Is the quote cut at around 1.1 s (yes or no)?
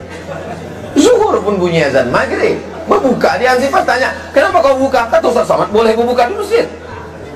no